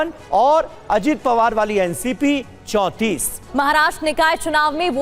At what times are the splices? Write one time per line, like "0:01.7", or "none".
0:03.3